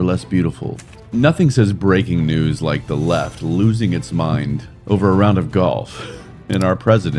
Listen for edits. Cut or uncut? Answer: cut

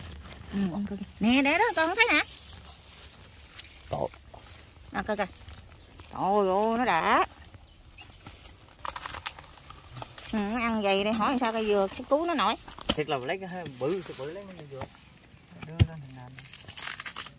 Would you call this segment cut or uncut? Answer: cut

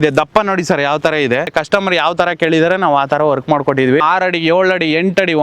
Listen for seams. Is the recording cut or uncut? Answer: cut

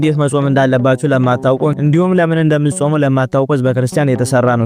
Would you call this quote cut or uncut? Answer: uncut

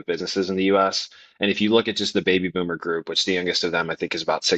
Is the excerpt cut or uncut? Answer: uncut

